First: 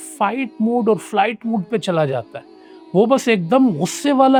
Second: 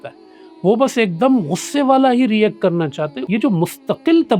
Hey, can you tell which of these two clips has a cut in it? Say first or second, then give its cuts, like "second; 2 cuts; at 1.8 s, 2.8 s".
second; 1 cut; at 3.2 s